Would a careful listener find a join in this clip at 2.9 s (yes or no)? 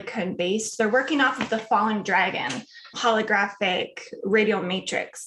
yes